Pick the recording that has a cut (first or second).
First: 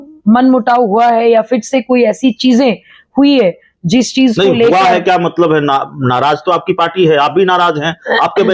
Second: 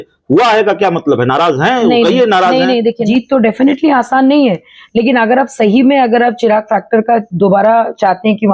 second